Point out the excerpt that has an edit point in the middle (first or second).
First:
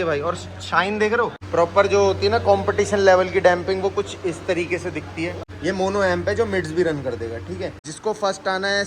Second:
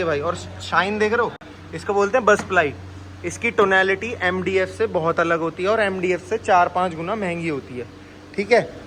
first